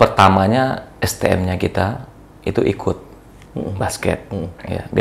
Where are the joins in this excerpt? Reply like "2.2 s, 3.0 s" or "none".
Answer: none